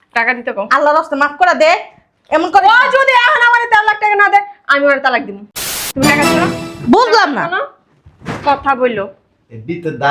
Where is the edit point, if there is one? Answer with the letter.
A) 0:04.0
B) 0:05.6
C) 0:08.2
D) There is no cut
B